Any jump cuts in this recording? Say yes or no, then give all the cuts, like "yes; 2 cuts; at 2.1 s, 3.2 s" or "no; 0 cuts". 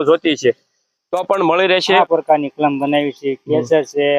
yes; 1 cut; at 2.0 s